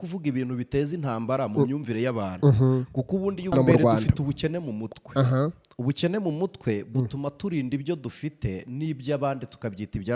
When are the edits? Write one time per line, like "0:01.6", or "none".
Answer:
0:03.6

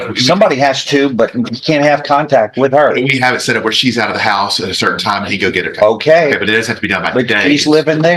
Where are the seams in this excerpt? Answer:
none

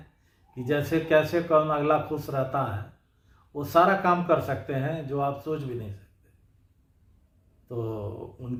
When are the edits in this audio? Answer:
none

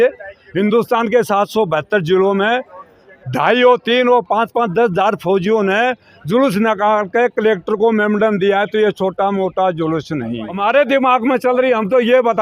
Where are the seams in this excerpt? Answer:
0:10.5

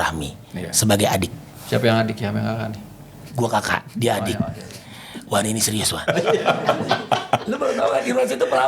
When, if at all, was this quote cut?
0:01.5

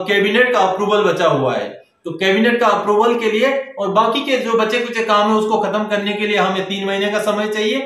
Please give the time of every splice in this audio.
none

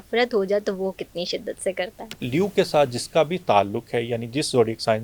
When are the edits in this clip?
0:02.2

